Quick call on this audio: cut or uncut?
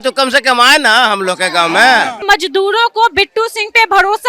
cut